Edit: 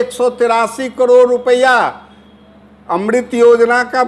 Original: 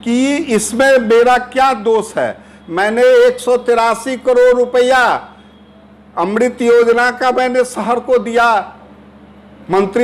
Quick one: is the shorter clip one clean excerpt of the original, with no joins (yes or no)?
yes